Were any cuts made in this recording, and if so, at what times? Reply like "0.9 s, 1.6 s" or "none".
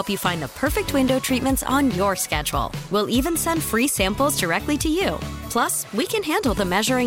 none